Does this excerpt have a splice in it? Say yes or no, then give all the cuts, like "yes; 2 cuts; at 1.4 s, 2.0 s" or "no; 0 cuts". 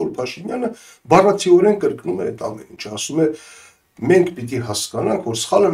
no; 0 cuts